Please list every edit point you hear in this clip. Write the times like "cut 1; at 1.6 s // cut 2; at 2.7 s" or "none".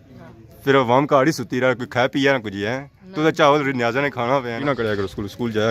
cut 1; at 4.6 s